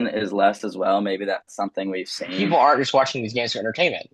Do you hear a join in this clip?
yes; 1 cut; at 2.3 s

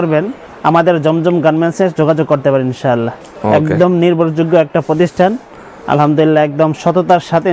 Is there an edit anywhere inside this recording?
no; 0 cuts

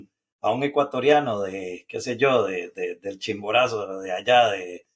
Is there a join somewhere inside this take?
no; 0 cuts

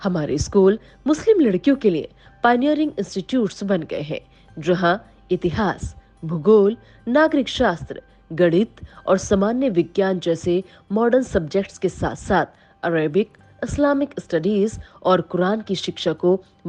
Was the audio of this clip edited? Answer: no; 0 cuts

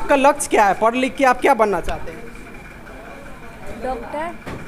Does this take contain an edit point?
no; 0 cuts

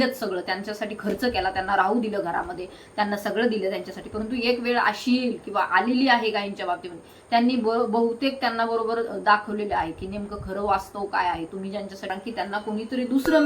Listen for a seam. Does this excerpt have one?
yes; 1 cut; at 12.1 s

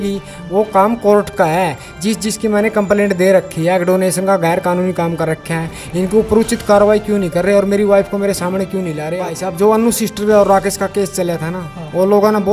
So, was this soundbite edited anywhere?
yes; 1 cut; at 9.1 s

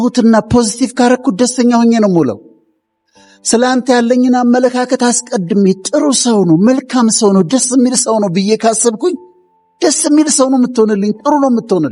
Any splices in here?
no; 0 cuts

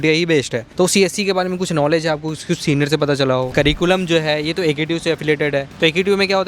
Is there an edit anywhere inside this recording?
yes; 1 cut; at 3.5 s

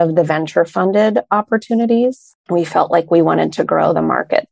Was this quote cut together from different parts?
yes; 1 cut; at 2.3 s

